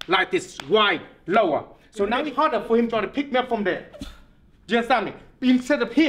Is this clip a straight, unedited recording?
no; 1 cut; at 2.2 s

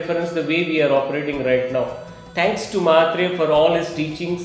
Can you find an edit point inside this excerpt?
no; 0 cuts

